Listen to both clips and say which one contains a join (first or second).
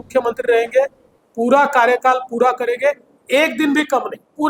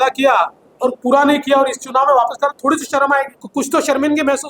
second